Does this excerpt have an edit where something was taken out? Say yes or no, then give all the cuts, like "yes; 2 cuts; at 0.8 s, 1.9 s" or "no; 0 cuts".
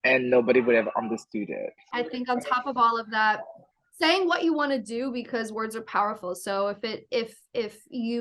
yes; 1 cut; at 1.8 s